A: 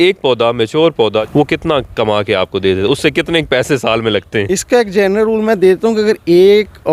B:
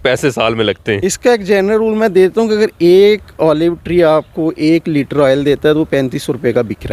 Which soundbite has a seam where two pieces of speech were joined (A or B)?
A